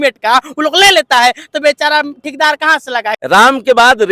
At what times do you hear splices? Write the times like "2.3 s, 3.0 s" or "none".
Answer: 3.2 s